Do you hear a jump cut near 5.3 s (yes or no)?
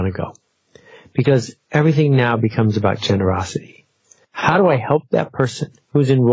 no